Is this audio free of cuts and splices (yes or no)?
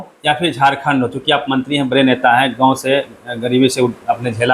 yes